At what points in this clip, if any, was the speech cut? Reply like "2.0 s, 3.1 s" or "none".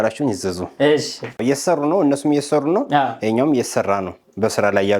1.4 s